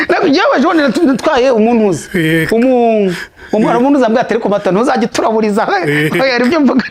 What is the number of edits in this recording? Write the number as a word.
zero